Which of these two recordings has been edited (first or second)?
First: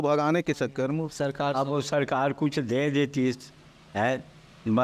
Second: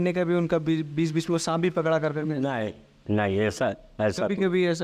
first